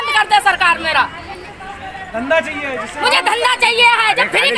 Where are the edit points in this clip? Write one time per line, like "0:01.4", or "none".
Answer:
none